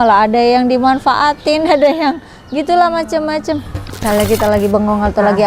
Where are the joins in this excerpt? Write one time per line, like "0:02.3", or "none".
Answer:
0:04.0